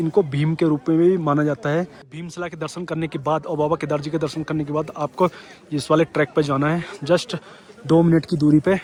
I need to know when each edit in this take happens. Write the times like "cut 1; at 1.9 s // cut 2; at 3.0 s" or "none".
none